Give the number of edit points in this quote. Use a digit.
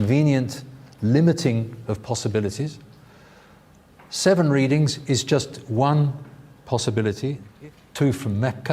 1